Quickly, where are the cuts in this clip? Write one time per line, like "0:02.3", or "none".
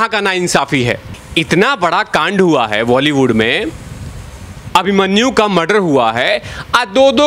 0:01.1